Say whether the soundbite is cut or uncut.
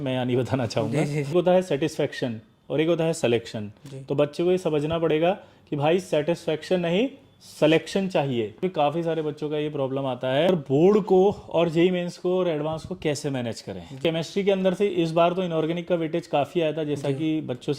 cut